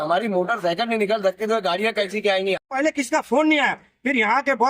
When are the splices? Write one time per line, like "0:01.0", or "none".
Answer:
0:02.7

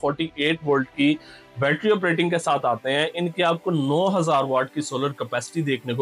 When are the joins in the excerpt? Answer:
none

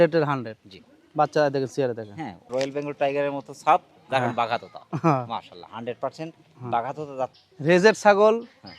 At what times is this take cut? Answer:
0:02.5
0:07.4

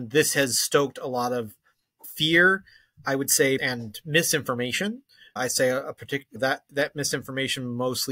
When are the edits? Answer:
0:03.6

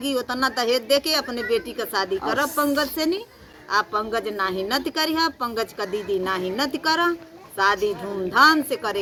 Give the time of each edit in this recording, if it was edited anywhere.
none

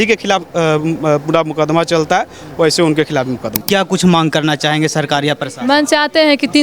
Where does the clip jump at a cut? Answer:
0:03.6

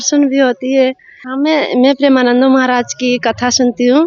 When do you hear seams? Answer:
0:01.2

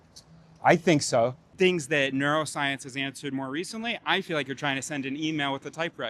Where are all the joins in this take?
0:01.4

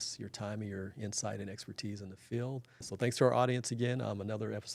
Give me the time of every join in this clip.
0:02.8

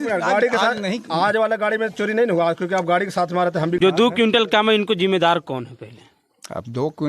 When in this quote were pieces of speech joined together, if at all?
0:03.8

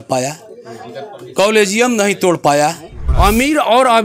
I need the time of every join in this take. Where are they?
0:03.0

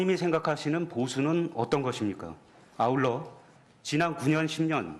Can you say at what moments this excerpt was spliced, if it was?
none

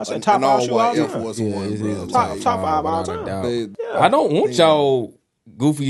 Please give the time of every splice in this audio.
0:03.7

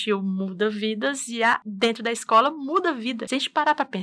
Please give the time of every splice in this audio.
0:01.7
0:03.2

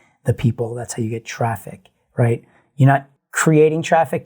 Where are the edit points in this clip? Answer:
0:03.1

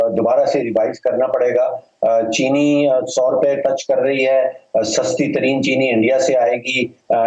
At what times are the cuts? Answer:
none

